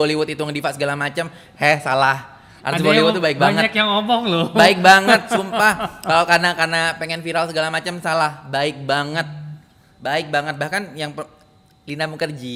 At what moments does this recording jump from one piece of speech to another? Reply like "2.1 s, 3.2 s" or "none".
none